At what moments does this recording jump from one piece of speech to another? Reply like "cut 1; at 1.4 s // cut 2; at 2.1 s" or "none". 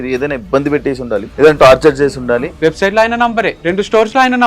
cut 1; at 1.3 s // cut 2; at 2.5 s // cut 3; at 3.5 s